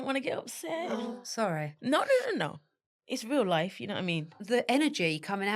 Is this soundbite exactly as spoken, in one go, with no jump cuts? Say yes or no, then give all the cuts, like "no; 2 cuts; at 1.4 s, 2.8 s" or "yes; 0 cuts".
no; 2 cuts; at 1.0 s, 4.4 s